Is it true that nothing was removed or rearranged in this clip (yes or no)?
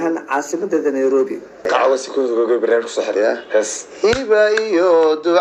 no